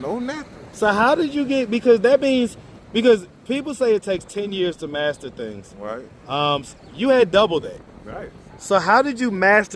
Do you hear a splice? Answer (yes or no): no